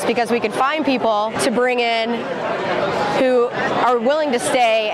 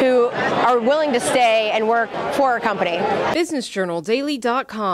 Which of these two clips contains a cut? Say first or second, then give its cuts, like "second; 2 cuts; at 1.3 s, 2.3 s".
second; 1 cut; at 3.3 s